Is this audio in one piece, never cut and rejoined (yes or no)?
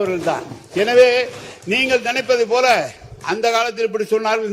yes